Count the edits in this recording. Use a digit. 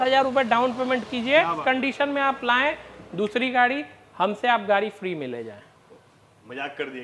1